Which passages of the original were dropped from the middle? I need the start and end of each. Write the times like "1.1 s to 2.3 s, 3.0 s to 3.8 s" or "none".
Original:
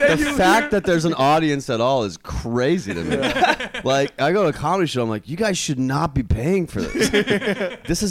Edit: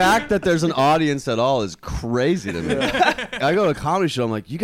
3.8 s to 4.1 s